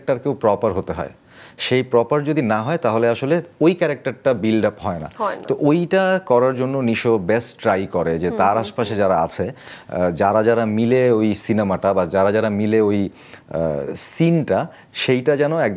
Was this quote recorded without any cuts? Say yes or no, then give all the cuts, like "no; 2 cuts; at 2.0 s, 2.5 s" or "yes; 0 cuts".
yes; 0 cuts